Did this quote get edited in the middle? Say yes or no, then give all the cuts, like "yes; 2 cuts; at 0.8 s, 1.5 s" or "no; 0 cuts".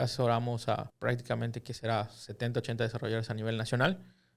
yes; 1 cut; at 0.9 s